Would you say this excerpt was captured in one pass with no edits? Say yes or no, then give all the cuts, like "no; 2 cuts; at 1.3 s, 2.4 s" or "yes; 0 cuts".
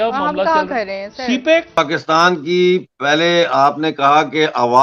no; 1 cut; at 1.8 s